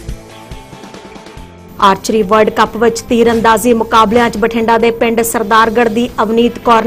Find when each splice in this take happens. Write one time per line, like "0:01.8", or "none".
none